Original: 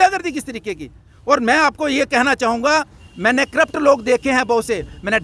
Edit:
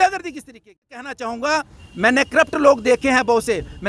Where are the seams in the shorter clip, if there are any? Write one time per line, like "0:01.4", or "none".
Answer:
0:01.2